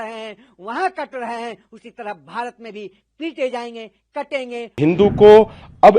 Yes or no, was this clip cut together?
yes